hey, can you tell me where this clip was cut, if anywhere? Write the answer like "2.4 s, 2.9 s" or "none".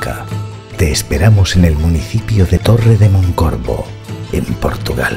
none